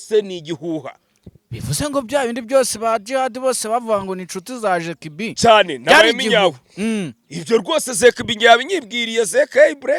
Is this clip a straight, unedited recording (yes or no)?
yes